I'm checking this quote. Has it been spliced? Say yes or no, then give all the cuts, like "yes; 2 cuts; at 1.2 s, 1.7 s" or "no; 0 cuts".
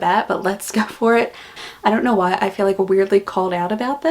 yes; 1 cut; at 1.6 s